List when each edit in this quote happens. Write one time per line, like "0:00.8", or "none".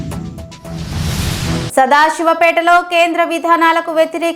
0:01.7